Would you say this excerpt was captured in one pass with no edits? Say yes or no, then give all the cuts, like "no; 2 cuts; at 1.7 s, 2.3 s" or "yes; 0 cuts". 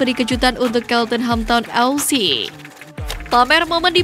no; 1 cut; at 2.6 s